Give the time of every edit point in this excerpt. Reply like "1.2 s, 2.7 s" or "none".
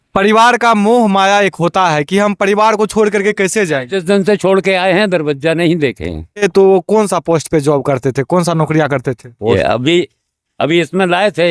6.4 s, 9.6 s